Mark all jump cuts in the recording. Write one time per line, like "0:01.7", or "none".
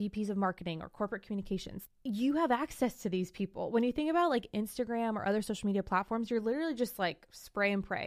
0:01.7